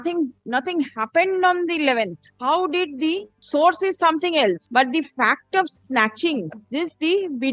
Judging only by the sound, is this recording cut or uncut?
cut